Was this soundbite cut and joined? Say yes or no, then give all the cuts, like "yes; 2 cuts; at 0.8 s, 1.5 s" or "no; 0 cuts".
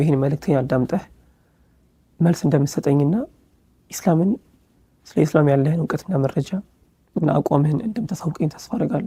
no; 0 cuts